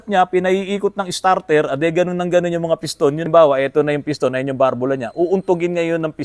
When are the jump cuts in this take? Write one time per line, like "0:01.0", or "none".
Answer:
0:03.3